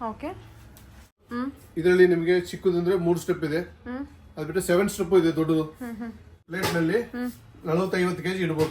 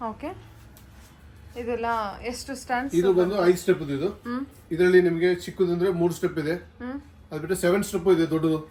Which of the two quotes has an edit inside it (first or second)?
first